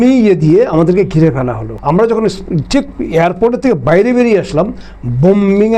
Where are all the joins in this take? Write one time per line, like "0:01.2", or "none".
none